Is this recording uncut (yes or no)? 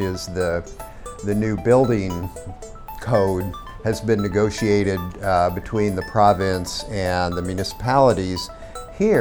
no